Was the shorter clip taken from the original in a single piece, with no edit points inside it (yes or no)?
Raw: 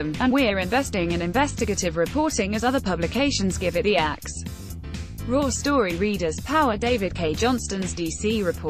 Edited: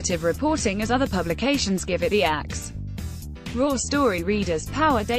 yes